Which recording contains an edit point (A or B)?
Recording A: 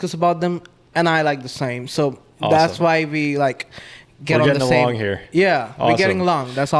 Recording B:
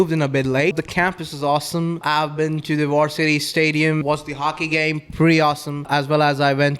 B